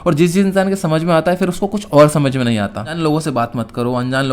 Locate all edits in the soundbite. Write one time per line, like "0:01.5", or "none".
0:02.9